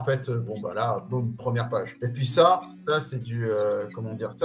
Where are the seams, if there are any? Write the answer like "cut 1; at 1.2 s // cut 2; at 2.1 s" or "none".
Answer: cut 1; at 1.9 s // cut 2; at 2.7 s